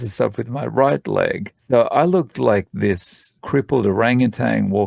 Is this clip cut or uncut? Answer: cut